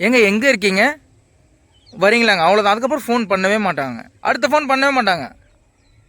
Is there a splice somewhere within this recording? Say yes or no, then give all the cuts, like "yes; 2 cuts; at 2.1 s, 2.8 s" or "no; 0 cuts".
yes; 1 cut; at 3.8 s